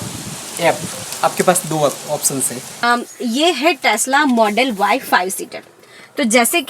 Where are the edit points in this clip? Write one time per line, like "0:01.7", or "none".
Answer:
0:02.8